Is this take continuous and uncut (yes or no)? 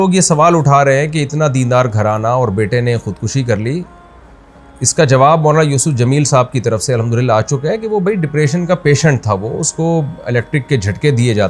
yes